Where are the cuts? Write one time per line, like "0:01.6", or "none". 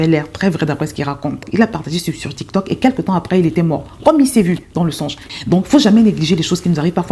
0:01.5
0:05.2